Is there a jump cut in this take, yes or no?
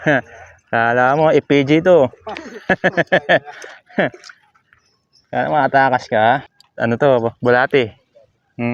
yes